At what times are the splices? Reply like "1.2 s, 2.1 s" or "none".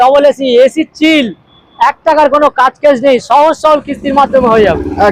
none